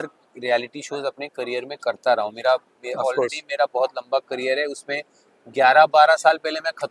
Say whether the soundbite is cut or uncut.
uncut